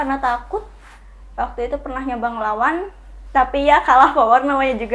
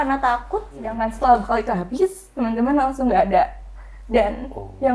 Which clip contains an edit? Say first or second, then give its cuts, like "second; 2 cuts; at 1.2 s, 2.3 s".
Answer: second; 1 cut; at 1.0 s